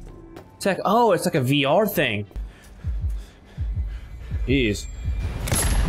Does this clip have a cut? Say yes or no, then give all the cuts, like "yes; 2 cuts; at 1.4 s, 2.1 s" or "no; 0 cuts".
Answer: yes; 1 cut; at 2.4 s